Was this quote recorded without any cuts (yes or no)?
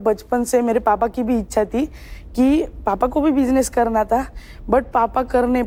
yes